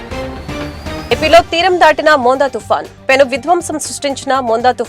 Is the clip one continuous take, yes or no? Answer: yes